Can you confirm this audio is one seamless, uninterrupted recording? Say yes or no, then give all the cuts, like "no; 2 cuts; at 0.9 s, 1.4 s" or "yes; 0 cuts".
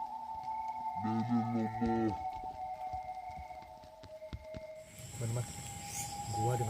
no; 1 cut; at 4.9 s